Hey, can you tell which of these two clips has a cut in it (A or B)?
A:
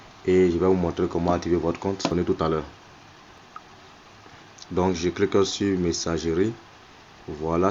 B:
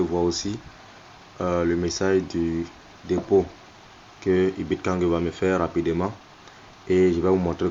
A